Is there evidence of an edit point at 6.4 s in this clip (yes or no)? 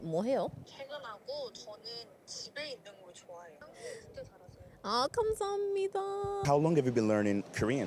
yes